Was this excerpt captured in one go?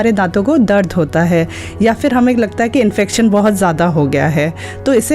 yes; 0 cuts

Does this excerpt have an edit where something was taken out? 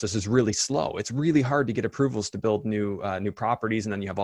no; 0 cuts

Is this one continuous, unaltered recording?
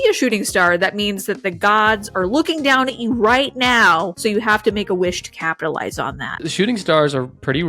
no; 2 cuts; at 4.1 s, 6.4 s

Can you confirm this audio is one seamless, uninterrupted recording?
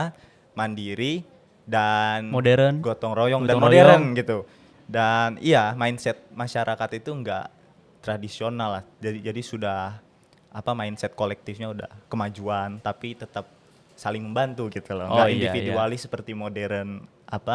yes; 0 cuts

